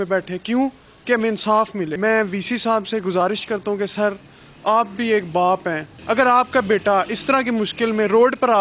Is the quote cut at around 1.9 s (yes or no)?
yes